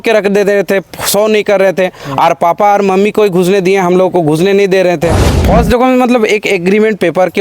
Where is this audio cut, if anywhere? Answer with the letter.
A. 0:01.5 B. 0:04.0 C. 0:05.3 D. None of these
C